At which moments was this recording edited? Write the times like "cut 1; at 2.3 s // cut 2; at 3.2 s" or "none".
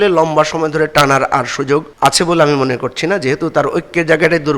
cut 1; at 1.9 s